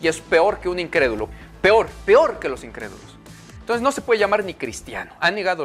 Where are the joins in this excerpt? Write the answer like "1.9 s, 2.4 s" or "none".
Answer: 1.3 s